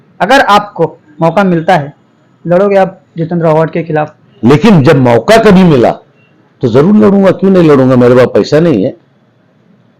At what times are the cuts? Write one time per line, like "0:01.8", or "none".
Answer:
0:04.2